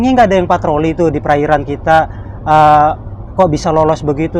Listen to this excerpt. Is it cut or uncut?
uncut